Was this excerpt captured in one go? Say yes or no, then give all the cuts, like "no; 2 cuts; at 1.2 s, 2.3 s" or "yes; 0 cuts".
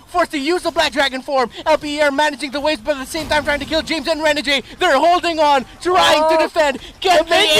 yes; 0 cuts